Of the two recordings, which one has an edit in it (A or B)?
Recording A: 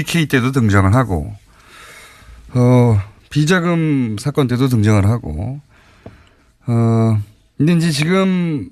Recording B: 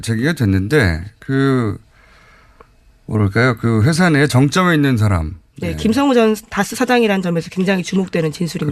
A